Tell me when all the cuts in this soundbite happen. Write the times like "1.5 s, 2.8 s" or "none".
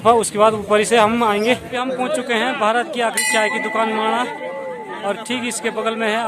1.7 s